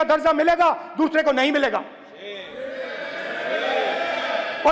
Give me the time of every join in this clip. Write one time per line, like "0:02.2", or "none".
none